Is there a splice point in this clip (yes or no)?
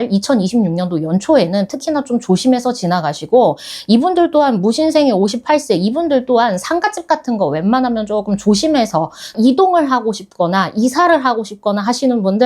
yes